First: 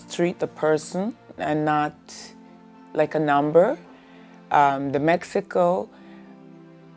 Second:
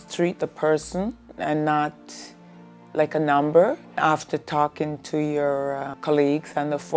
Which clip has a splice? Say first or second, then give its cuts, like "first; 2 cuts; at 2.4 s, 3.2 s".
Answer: second; 2 cuts; at 4.0 s, 5.9 s